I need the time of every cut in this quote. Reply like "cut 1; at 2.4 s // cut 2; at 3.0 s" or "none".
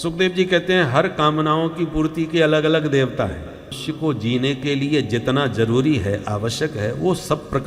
cut 1; at 3.8 s